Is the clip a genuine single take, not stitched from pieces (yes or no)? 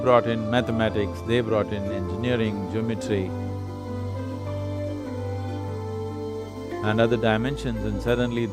yes